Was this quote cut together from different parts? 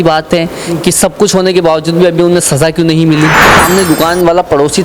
yes; 1 cut; at 3.5 s

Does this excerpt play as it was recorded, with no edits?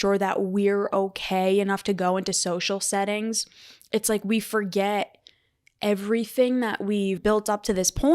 no; 1 cut; at 7.2 s

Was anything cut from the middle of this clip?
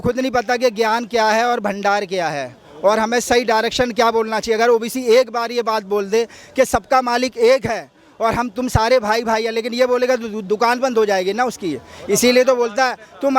no; 0 cuts

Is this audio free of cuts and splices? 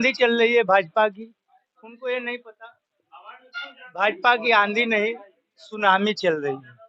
yes; 0 cuts

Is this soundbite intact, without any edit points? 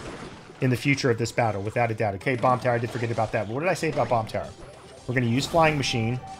no; 1 cut; at 2.2 s

